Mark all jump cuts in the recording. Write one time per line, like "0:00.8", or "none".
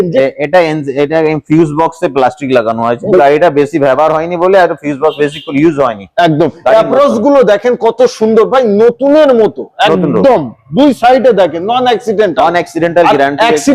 none